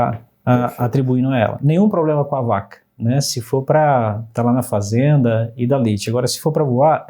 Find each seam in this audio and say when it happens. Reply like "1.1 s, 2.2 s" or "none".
none